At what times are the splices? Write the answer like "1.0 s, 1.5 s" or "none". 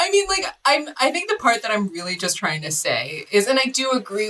none